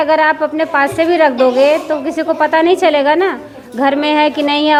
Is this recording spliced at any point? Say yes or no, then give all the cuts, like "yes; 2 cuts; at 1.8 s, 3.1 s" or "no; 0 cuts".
no; 0 cuts